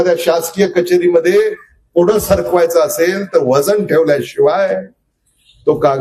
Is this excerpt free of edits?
yes; 0 cuts

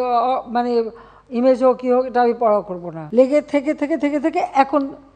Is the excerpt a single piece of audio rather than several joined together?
no; 1 cut; at 2.9 s

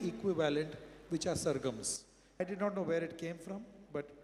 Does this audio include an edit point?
yes; 1 cut; at 2.4 s

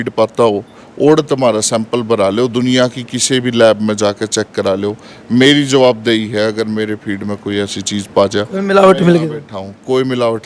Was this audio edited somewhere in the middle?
no; 0 cuts

